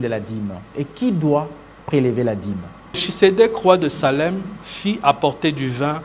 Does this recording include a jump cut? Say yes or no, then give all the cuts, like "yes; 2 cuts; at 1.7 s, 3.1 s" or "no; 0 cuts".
yes; 1 cut; at 3.1 s